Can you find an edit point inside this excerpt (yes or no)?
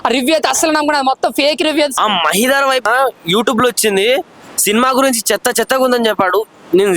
yes